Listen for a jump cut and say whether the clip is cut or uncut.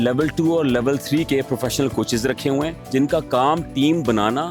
uncut